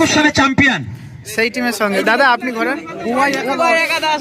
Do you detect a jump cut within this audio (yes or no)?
no